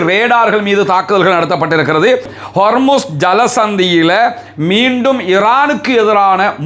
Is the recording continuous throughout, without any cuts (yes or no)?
no